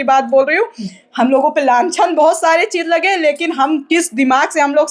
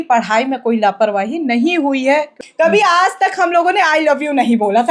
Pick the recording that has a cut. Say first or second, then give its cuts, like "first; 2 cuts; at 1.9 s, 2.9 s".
second; 1 cut; at 2.4 s